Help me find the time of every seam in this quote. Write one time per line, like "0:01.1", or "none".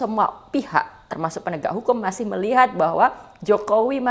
none